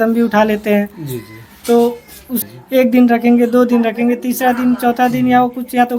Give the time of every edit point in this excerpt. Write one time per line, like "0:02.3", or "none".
0:02.4